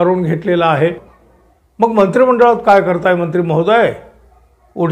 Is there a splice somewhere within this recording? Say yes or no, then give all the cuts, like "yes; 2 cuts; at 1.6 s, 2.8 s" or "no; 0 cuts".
yes; 1 cut; at 1.0 s